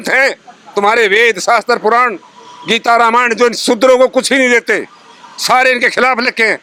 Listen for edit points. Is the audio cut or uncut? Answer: uncut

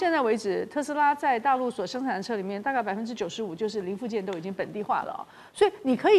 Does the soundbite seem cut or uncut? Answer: uncut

